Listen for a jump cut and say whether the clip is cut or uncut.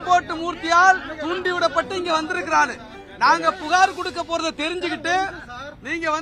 uncut